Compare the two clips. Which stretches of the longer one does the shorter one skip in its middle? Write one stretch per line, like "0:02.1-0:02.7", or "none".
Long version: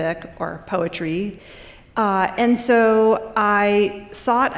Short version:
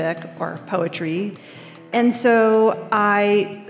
0:01.9-0:02.3